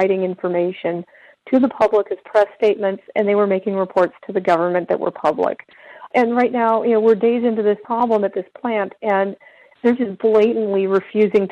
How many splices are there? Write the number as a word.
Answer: one